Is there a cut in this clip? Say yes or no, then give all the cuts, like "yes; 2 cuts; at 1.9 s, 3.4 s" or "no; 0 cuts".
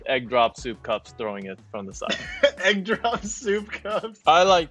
no; 0 cuts